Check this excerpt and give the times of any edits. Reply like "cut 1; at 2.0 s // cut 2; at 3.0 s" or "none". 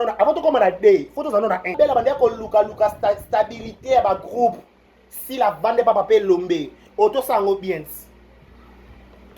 cut 1; at 1.7 s